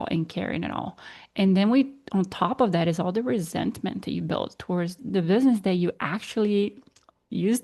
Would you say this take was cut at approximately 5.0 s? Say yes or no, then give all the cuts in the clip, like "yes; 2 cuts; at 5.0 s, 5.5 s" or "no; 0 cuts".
yes; 1 cut; at 5.0 s